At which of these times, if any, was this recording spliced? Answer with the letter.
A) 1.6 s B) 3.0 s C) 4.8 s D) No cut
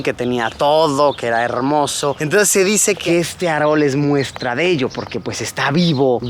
B